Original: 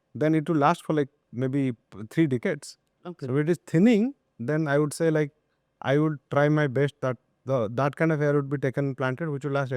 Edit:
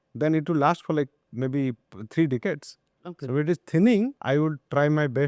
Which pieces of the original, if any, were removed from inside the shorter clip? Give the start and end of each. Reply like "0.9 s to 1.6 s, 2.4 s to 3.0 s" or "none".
4.2 s to 5.8 s